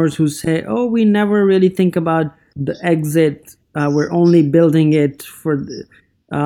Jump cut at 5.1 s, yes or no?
no